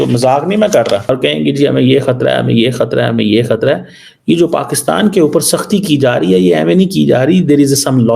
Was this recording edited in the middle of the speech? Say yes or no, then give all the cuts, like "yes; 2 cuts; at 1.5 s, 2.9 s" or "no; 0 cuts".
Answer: yes; 1 cut; at 1.1 s